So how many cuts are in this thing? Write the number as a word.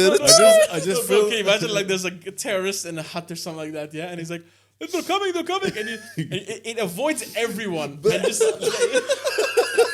zero